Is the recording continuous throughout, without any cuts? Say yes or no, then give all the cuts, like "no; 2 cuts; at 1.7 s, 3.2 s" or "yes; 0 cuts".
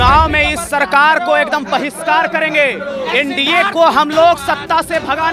yes; 0 cuts